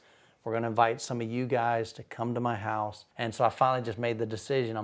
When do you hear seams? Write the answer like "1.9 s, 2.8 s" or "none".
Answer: 3.0 s